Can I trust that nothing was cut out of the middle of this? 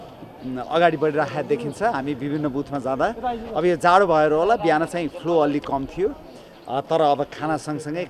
yes; 0 cuts

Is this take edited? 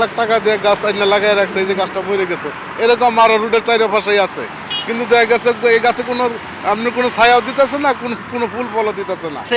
no; 0 cuts

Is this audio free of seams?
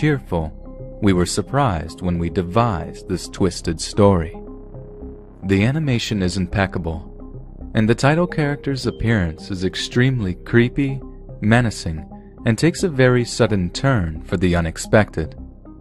no; 1 cut; at 2.9 s

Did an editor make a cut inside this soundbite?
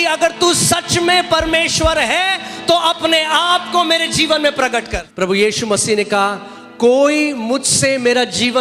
yes; 1 cut; at 5.0 s

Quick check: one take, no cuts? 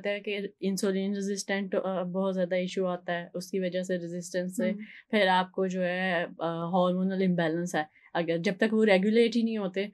yes; 0 cuts

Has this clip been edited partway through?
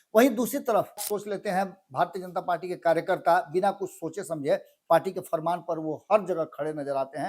yes; 1 cut; at 1.0 s

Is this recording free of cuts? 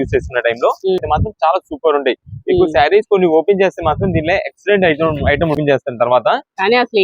no; 2 cuts; at 1.0 s, 5.6 s

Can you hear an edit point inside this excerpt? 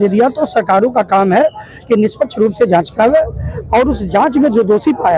no; 0 cuts

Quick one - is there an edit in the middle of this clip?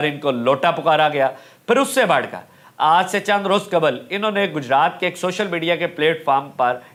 no; 0 cuts

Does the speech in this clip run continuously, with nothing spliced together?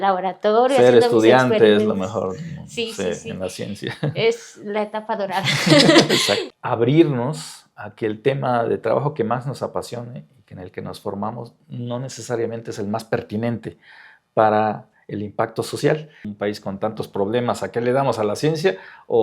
no; 2 cuts; at 6.5 s, 16.3 s

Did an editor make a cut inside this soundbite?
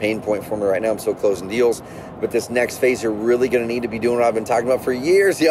no; 0 cuts

